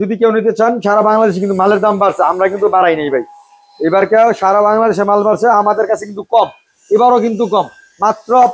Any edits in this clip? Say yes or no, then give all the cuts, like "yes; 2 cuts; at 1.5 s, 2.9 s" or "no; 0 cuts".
no; 0 cuts